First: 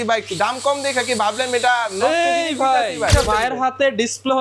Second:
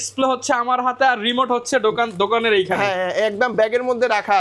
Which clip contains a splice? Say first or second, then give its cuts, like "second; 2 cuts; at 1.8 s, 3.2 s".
first; 1 cut; at 3.1 s